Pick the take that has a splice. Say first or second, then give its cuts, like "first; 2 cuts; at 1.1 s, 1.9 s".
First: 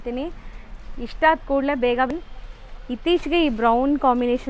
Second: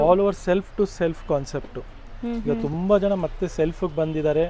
first; 1 cut; at 2.1 s